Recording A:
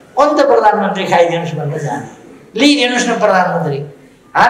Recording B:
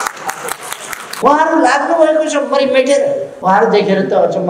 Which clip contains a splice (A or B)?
B